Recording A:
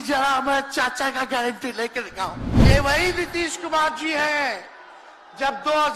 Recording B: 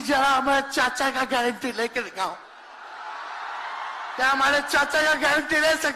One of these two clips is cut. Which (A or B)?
A